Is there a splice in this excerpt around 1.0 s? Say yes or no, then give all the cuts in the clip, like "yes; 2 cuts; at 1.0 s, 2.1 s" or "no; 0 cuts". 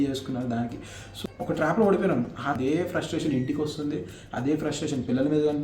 yes; 2 cuts; at 1.0 s, 2.6 s